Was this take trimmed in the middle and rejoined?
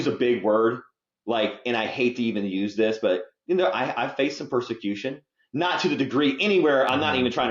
no; 0 cuts

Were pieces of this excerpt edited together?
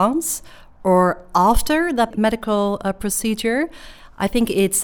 yes; 1 cut; at 2.1 s

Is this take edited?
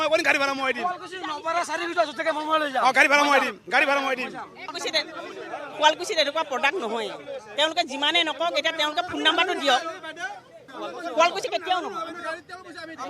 yes; 2 cuts; at 4.7 s, 10.6 s

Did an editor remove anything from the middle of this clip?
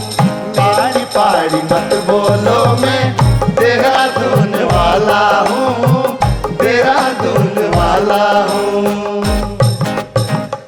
no; 0 cuts

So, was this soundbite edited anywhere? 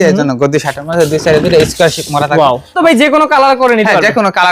yes; 1 cut; at 2.8 s

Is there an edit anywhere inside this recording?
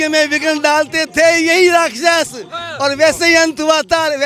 no; 0 cuts

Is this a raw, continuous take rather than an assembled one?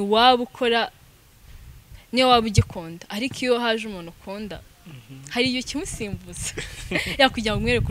yes; 0 cuts

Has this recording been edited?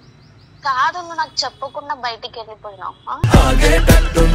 yes; 1 cut; at 3.2 s

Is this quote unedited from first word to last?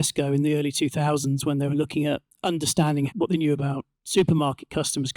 no; 1 cut; at 3.1 s

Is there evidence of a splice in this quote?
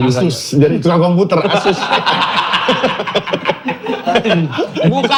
no; 0 cuts

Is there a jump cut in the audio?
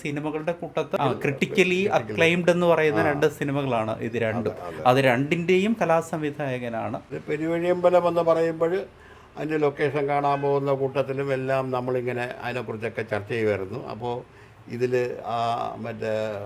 yes; 2 cuts; at 1.0 s, 7.1 s

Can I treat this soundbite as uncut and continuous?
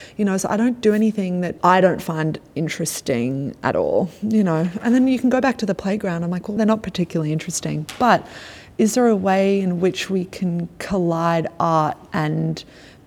no; 2 cuts; at 1.6 s, 6.6 s

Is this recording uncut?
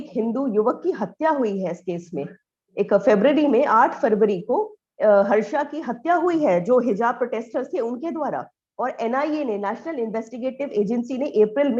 yes; 0 cuts

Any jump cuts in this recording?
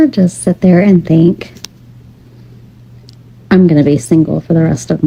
no; 0 cuts

